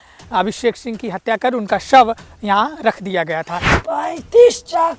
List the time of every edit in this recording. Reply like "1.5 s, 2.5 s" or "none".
3.8 s

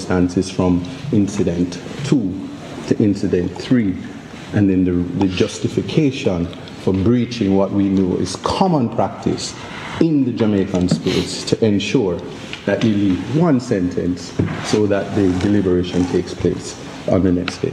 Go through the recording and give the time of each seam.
none

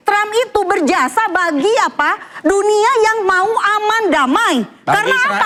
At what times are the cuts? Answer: none

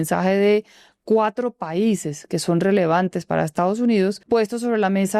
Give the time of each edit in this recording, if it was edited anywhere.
4.2 s

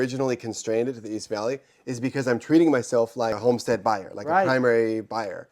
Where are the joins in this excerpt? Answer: 3.4 s

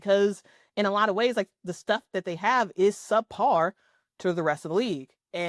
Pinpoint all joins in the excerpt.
none

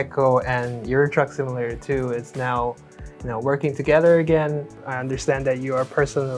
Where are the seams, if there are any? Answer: 4.8 s

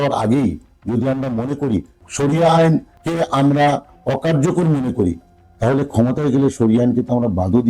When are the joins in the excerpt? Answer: 2.0 s, 3.0 s

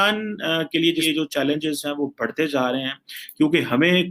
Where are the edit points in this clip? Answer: 1.0 s

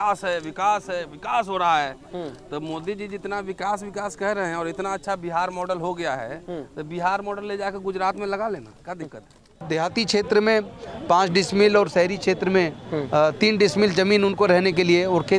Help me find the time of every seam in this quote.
9.6 s

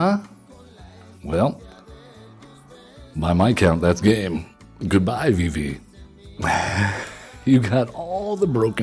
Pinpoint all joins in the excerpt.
none

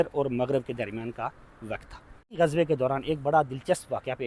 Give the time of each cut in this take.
2.4 s

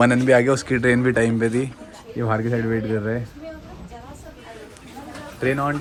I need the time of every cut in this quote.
none

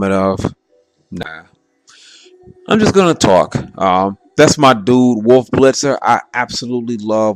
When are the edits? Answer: 1.8 s

